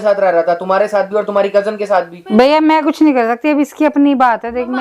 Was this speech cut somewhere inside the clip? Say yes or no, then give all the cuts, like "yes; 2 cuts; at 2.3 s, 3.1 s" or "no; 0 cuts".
yes; 1 cut; at 2.2 s